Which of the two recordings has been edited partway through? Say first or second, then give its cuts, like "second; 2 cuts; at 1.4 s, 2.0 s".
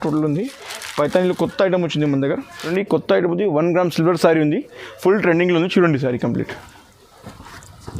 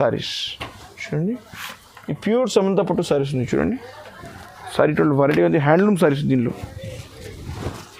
first; 1 cut; at 2.5 s